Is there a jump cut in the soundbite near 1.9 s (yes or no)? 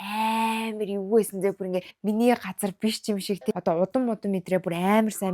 yes